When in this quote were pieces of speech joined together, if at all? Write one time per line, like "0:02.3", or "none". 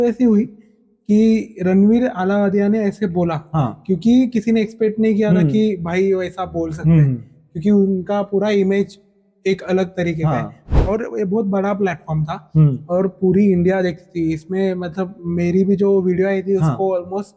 0:10.8